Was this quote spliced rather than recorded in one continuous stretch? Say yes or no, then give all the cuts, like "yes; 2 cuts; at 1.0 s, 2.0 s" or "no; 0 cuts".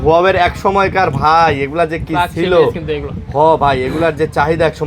no; 0 cuts